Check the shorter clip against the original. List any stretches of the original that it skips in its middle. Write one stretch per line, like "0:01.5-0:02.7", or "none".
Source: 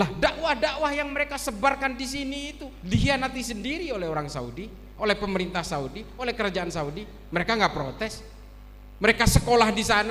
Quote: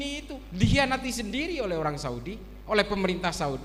none